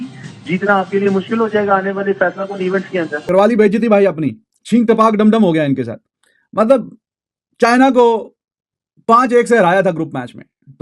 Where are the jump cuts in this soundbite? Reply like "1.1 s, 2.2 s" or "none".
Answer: none

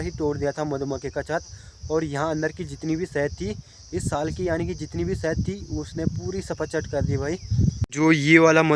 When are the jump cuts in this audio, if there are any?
7.8 s

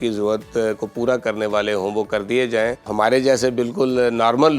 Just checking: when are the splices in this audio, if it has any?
2.9 s

